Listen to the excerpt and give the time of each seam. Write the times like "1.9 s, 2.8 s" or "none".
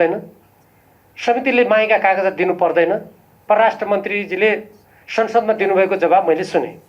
3.4 s